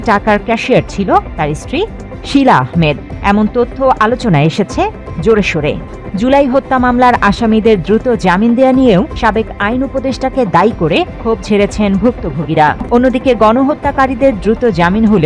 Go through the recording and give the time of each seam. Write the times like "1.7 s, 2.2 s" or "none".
6.0 s, 12.8 s